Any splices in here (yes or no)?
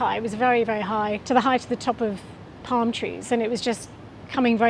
no